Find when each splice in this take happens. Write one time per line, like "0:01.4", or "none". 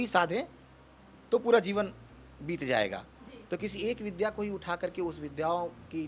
none